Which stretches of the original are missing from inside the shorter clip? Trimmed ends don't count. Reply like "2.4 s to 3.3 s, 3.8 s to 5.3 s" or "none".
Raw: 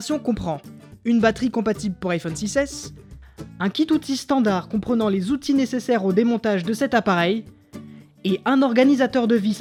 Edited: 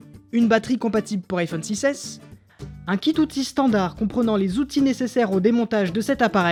none